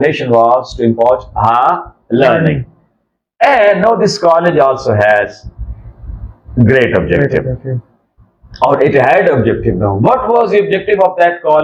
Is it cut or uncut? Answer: uncut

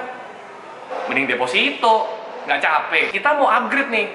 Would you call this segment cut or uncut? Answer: cut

